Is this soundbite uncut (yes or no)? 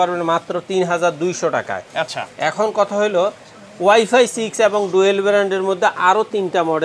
yes